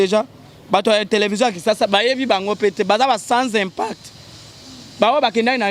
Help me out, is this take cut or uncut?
uncut